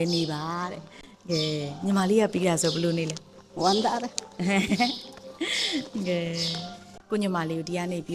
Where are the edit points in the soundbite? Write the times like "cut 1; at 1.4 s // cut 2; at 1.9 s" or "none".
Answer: cut 1; at 6.9 s